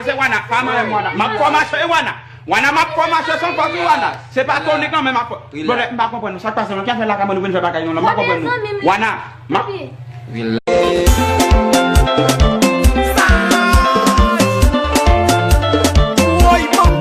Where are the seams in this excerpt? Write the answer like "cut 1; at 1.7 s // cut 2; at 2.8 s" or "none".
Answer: none